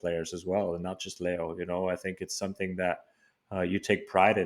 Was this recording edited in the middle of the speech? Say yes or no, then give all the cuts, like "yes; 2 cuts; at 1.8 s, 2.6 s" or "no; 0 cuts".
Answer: no; 0 cuts